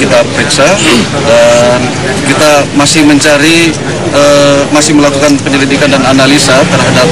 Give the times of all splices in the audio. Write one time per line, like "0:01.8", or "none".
0:04.0

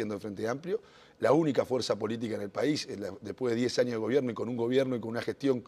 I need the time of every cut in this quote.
0:03.9

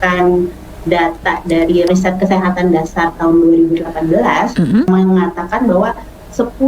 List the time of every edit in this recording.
0:01.9
0:04.9

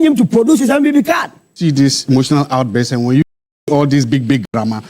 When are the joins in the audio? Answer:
0:01.6

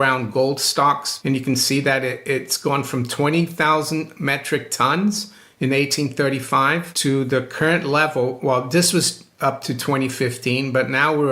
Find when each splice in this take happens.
0:01.1
0:06.9

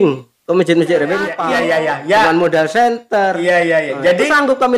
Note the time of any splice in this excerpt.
0:01.4

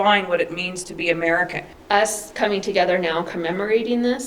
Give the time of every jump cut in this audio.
0:01.7

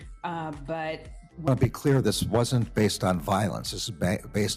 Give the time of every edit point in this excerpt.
0:01.4

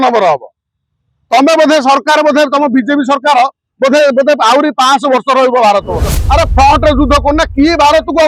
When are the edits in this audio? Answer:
0:06.1

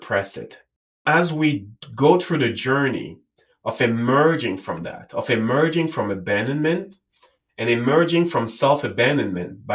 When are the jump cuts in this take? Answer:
0:01.0

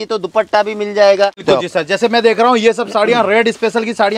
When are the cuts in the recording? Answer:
0:01.4

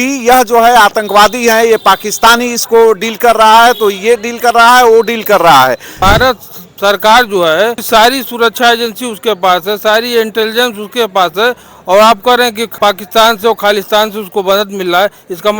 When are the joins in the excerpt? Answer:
0:05.9
0:07.8
0:12.6

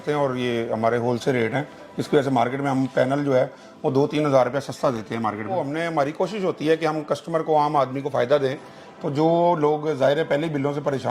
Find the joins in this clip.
0:05.5

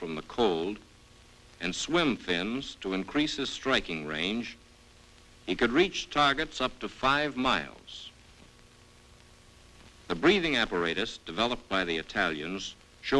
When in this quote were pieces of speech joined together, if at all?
none

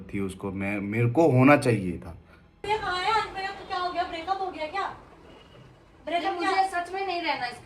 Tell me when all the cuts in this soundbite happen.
0:02.6

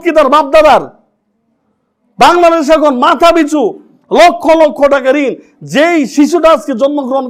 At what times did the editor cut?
none

